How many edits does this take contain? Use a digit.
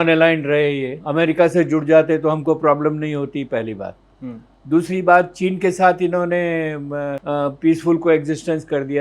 2